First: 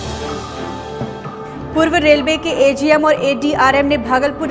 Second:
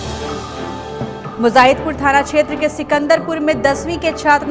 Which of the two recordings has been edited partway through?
first; 1 cut; at 1.3 s

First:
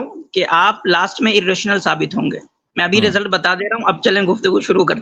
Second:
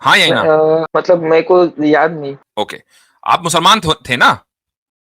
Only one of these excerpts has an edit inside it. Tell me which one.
second; 2 cuts; at 0.9 s, 2.4 s

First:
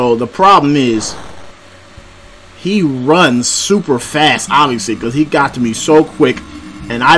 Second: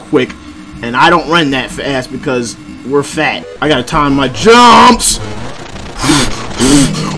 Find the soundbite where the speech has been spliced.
second; 1 cut; at 3.5 s

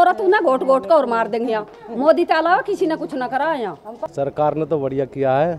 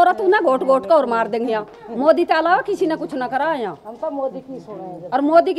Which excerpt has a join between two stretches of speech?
first; 1 cut; at 3.9 s

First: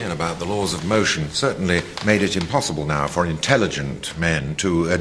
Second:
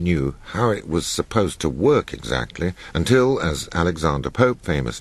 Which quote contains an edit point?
first; 1 cut; at 2.2 s

